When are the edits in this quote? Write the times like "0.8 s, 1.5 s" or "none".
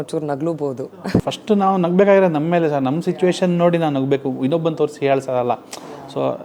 none